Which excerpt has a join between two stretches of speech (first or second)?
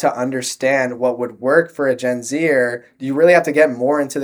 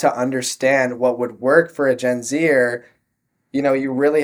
first